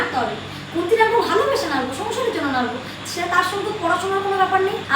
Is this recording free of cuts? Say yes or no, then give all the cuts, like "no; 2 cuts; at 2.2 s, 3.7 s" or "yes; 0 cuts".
yes; 0 cuts